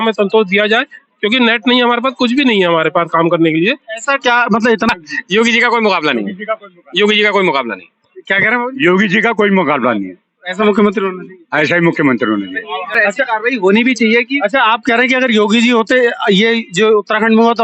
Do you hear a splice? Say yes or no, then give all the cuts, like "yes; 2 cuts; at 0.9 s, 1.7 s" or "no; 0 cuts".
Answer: yes; 2 cuts; at 4.9 s, 13.0 s